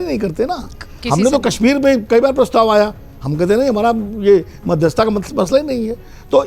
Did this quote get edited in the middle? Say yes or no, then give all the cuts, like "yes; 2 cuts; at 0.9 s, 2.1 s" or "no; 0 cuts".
no; 0 cuts